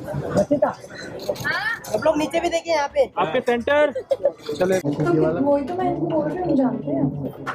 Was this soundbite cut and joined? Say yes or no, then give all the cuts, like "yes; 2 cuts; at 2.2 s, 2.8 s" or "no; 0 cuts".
yes; 1 cut; at 4.8 s